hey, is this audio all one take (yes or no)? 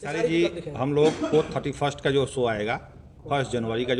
yes